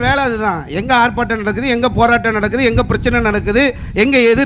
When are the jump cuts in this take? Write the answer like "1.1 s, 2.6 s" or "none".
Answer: none